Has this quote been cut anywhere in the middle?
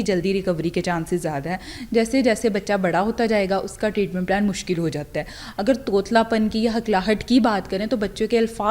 no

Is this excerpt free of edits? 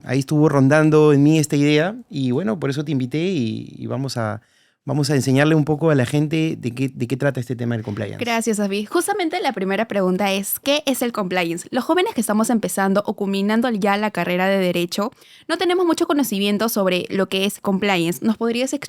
yes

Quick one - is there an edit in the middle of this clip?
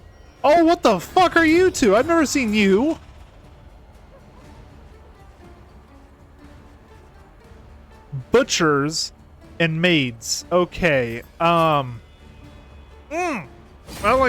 no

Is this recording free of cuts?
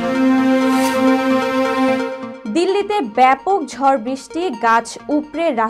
yes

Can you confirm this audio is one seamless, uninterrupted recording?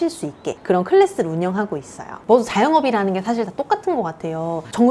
no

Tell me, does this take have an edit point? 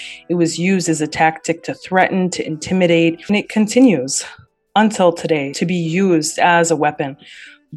yes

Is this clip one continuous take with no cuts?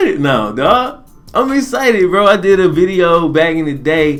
yes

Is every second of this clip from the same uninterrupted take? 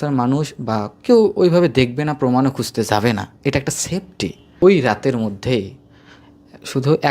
no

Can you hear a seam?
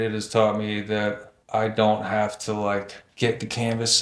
yes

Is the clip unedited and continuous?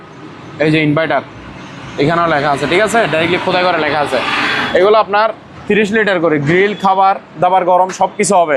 yes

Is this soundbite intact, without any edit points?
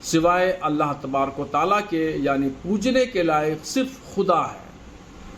no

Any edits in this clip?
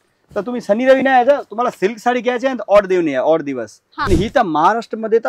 yes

